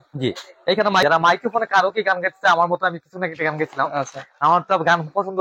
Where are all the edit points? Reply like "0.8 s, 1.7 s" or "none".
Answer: 1.0 s